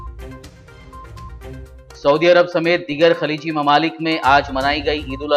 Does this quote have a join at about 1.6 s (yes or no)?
no